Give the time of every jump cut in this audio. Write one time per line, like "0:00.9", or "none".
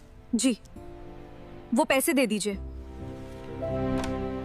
0:03.5